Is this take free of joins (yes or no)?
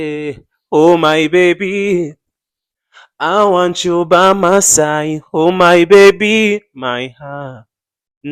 yes